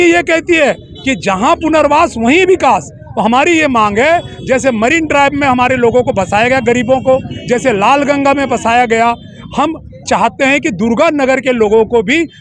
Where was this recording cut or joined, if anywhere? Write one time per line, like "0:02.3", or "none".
none